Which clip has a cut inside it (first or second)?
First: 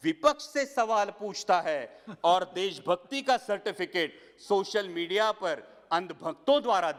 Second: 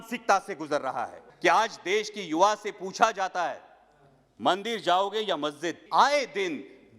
second